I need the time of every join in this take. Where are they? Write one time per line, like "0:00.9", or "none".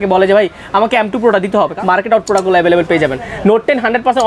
0:01.7

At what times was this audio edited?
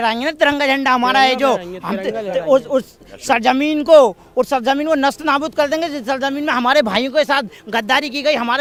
none

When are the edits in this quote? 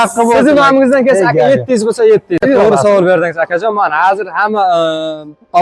0:02.4

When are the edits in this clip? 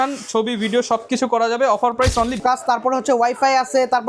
0:02.4

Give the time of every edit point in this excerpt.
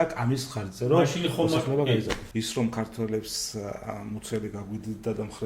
0:02.2

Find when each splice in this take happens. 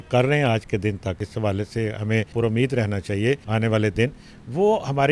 0:01.2
0:02.3
0:03.5

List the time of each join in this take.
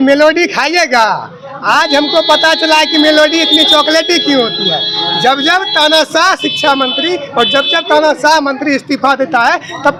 none

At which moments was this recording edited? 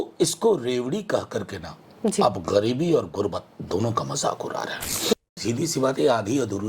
0:05.1

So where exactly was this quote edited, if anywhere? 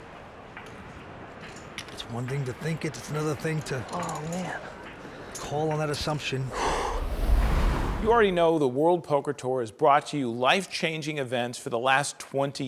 0:07.4

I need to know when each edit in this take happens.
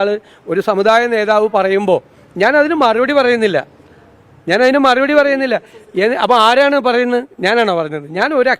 none

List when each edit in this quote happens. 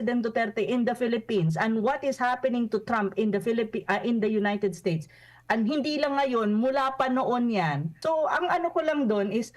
0:07.9

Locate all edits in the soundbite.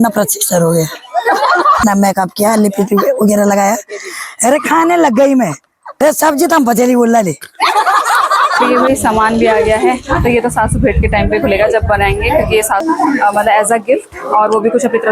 0:01.8
0:06.0
0:08.7
0:12.8

